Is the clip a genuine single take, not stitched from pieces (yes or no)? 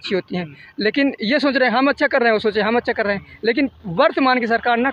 yes